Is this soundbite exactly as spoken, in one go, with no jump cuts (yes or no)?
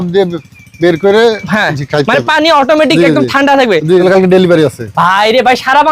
no